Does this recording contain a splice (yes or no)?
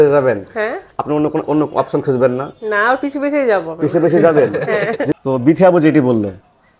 yes